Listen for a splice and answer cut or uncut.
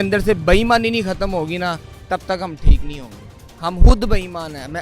uncut